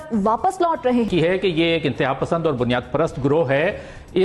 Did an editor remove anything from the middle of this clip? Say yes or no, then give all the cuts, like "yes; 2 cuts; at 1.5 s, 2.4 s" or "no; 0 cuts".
yes; 1 cut; at 1.1 s